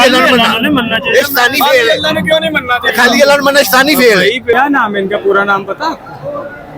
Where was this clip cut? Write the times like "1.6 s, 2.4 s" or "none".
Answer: 4.5 s